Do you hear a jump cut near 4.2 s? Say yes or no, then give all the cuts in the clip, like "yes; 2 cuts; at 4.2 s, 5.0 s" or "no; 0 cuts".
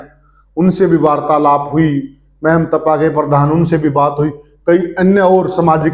no; 0 cuts